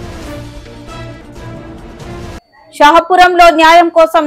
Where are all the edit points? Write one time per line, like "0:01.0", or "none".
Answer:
none